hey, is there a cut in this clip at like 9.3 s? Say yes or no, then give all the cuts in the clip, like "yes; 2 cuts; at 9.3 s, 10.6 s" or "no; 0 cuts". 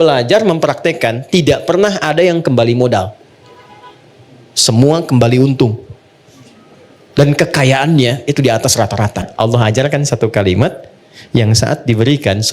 yes; 1 cut; at 9.3 s